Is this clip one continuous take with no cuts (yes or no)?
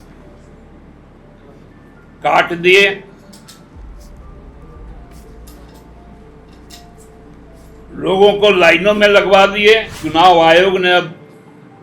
no